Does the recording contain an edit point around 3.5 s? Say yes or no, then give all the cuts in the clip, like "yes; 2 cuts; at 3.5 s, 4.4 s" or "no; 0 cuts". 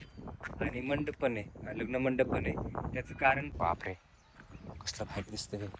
yes; 1 cut; at 3.5 s